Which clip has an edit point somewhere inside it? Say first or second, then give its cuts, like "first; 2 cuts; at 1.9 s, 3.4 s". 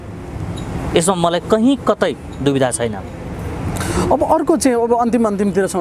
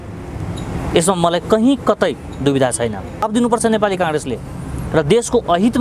second; 1 cut; at 3.2 s